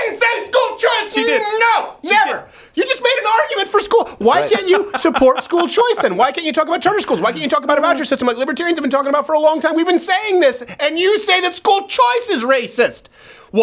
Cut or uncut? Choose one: uncut